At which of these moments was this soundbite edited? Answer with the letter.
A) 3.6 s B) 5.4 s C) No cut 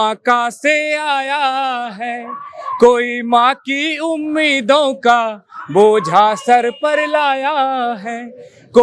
C